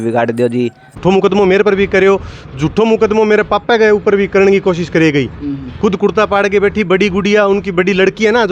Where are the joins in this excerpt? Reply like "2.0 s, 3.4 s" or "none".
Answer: 0.9 s